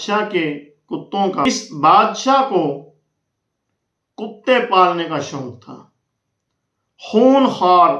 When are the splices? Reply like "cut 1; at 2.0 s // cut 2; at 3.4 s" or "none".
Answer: cut 1; at 1.5 s